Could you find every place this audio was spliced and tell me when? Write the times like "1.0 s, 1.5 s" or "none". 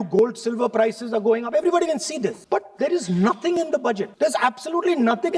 2.4 s, 4.1 s